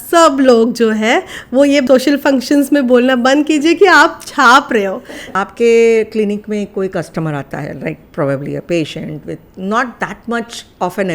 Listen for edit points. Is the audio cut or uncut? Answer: cut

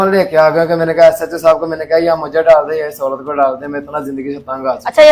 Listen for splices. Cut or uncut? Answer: uncut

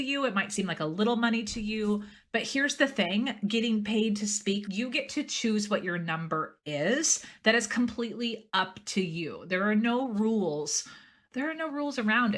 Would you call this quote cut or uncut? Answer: cut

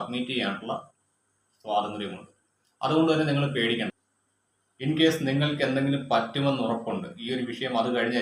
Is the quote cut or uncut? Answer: cut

